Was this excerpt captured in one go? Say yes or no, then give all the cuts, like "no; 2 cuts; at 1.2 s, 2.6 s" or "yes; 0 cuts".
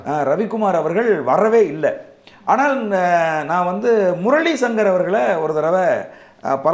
yes; 0 cuts